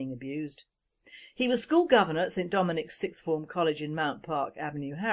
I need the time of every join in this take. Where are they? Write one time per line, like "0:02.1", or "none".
none